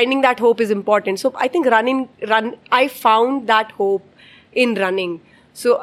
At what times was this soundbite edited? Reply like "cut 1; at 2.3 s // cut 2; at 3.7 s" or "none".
none